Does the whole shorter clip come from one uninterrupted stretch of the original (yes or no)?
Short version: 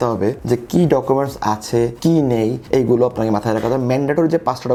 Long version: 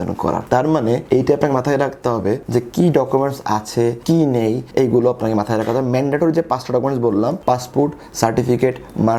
yes